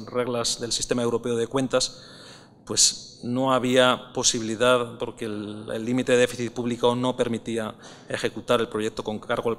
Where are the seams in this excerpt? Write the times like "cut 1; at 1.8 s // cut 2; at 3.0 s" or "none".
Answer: cut 1; at 1.1 s